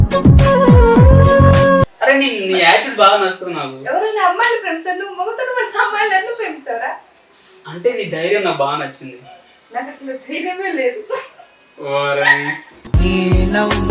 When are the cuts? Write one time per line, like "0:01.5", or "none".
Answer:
0:01.9